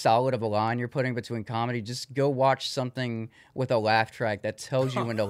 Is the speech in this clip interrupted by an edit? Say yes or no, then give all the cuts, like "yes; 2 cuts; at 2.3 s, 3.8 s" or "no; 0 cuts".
no; 0 cuts